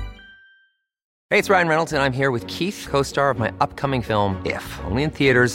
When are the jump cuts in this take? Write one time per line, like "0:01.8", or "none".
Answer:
0:01.1